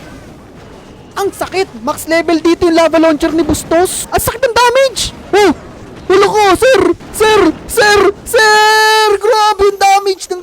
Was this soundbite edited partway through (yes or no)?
yes